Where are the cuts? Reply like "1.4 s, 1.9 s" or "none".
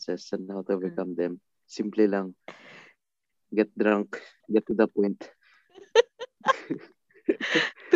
4.3 s

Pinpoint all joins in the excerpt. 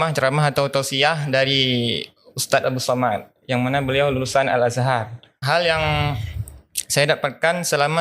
5.4 s

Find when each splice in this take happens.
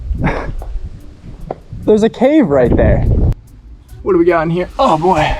3.3 s

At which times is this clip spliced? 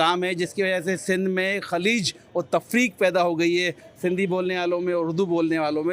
none

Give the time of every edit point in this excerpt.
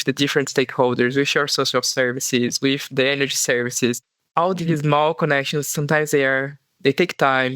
4.1 s

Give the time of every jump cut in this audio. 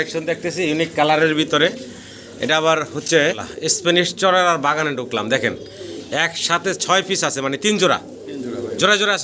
3.4 s

